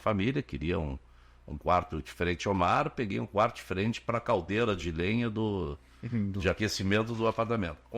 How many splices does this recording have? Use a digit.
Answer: 0